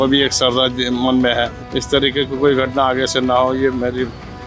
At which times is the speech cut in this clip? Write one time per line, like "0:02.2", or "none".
0:01.6